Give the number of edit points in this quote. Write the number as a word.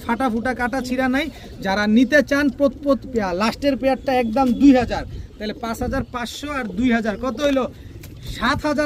zero